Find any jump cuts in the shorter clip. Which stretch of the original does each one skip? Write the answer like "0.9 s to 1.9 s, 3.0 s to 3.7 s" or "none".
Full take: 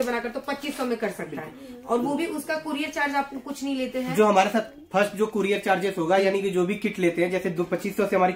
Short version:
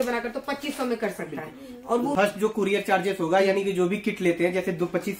2.1 s to 4.9 s